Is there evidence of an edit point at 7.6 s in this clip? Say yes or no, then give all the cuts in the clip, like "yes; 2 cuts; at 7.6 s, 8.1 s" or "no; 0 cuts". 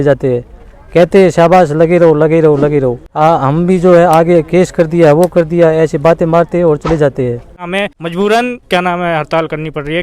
yes; 1 cut; at 7.6 s